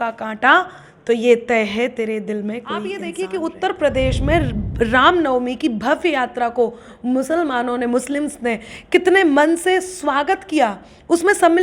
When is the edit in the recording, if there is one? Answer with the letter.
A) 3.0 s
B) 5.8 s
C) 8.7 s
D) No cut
A